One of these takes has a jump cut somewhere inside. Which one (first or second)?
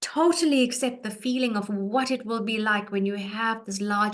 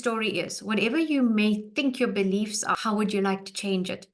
second